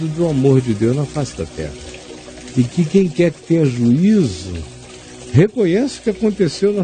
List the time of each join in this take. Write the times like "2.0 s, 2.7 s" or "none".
3.8 s